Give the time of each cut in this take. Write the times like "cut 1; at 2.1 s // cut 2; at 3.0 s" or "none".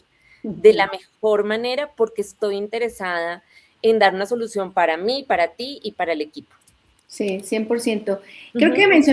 none